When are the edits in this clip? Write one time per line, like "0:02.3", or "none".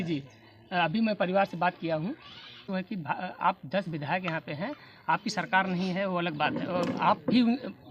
0:02.6